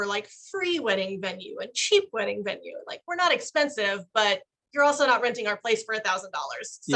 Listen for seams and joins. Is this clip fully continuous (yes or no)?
yes